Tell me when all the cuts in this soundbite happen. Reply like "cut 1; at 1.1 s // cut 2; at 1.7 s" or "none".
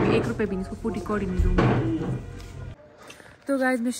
cut 1; at 2.8 s

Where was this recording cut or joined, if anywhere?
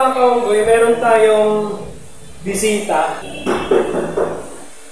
cut 1; at 3.3 s

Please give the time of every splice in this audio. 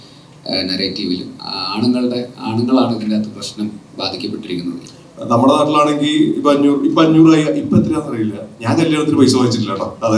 cut 1; at 4.8 s

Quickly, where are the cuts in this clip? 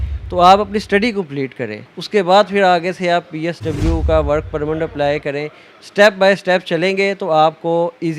cut 1; at 1.8 s

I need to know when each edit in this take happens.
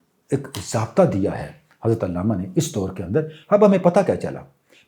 none

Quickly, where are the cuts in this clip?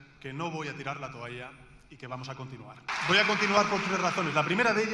cut 1; at 2.9 s

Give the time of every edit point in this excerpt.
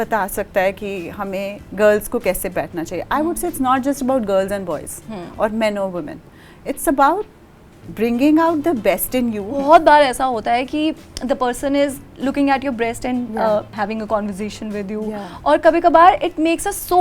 cut 1; at 9.6 s // cut 2; at 13.7 s

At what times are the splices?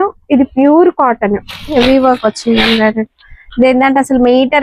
cut 1; at 1.7 s

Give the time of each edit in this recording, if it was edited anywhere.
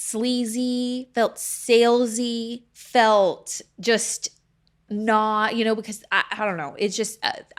none

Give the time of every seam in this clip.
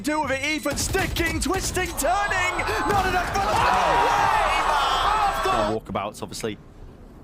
cut 1; at 5.7 s

